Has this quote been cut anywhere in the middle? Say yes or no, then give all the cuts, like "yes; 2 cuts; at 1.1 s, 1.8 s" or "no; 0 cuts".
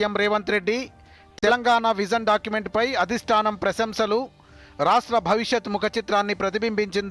no; 0 cuts